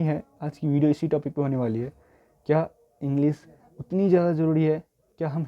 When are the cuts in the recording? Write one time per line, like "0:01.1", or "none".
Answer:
none